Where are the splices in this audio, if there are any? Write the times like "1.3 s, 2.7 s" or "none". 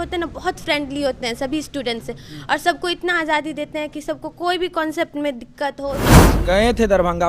6.2 s